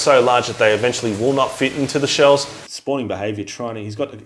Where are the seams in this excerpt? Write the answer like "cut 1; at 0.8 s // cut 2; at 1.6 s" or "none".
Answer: cut 1; at 2.6 s